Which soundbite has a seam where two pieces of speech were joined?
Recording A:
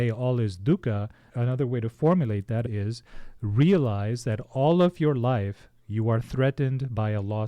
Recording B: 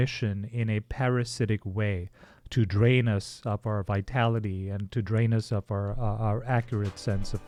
A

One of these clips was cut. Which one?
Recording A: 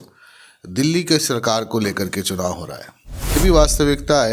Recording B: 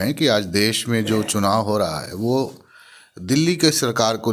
A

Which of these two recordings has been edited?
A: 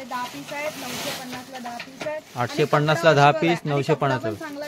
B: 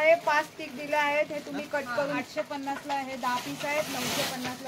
B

